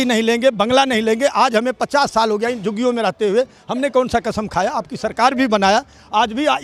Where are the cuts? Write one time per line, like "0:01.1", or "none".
none